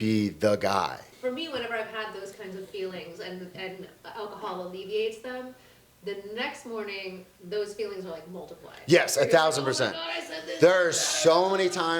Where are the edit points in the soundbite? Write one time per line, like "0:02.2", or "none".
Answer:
0:01.1